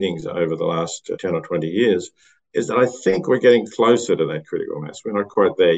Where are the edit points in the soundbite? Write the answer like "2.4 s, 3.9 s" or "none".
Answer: none